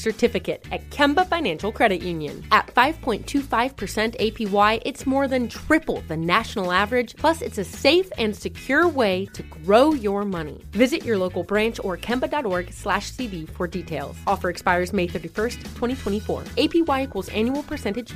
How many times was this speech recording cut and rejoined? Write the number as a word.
zero